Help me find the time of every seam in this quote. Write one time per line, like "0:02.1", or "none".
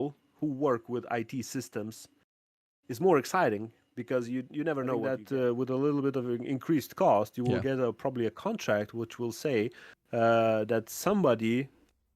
0:05.1